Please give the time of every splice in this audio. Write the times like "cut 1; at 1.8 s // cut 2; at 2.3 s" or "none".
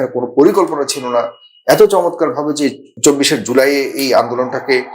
cut 1; at 2.9 s